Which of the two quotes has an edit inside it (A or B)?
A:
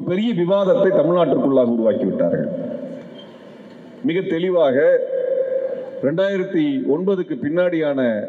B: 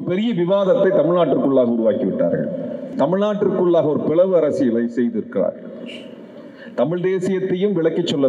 B